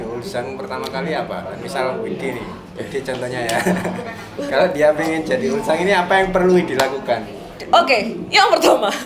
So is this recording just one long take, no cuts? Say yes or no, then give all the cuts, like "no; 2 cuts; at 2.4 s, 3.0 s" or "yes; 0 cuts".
yes; 0 cuts